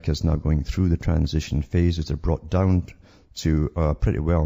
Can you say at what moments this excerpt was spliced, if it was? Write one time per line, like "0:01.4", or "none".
0:02.9